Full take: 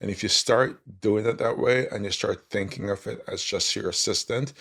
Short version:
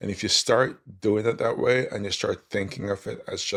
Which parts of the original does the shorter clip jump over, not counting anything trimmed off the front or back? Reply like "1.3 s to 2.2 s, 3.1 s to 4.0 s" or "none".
none